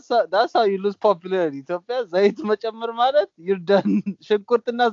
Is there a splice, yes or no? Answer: no